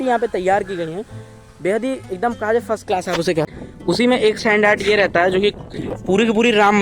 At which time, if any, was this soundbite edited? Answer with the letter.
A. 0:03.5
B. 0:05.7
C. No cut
A